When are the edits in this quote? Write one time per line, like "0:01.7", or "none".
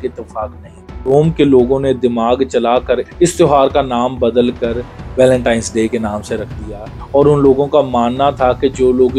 0:01.1
0:07.0